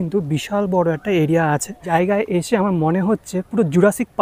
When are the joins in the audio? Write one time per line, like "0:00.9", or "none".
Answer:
0:01.8